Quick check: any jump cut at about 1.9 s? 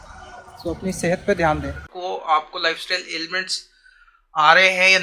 yes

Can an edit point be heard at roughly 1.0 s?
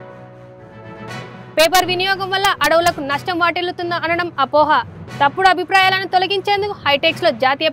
yes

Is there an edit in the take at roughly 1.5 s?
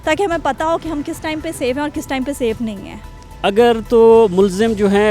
no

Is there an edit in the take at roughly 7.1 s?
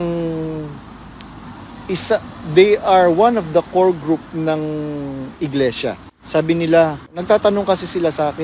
yes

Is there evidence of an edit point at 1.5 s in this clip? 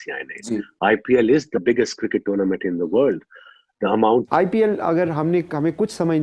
no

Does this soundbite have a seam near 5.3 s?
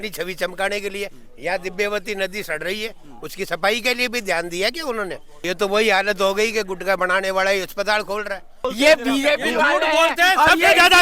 yes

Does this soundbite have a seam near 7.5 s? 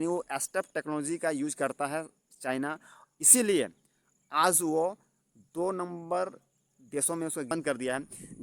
yes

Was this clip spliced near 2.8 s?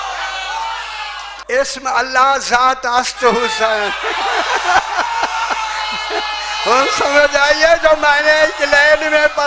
no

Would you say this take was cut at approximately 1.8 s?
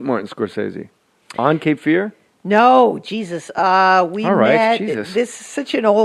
yes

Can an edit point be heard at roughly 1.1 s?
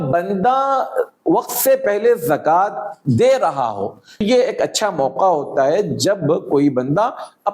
no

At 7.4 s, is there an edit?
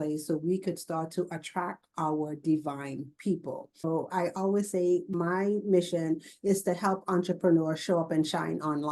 no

